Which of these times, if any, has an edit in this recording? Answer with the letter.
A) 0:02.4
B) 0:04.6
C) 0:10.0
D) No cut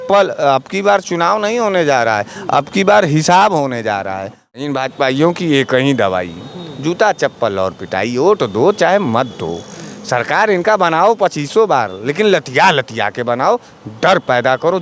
B